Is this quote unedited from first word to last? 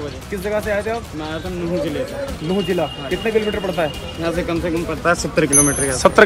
yes; 0 cuts

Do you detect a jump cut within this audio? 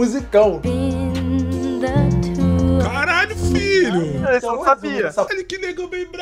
yes; 1 cut; at 5.3 s

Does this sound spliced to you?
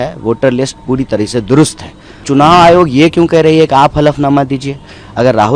yes; 1 cut; at 2.2 s

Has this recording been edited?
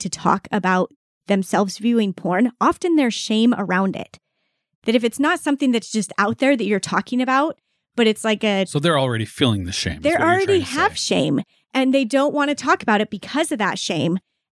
no; 0 cuts

